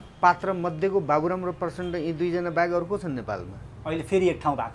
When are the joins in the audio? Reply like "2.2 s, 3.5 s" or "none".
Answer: none